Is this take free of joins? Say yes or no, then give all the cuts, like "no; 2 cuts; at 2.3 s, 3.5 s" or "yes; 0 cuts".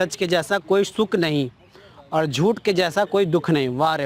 yes; 0 cuts